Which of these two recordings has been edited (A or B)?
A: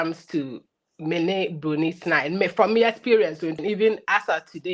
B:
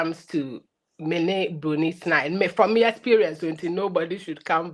A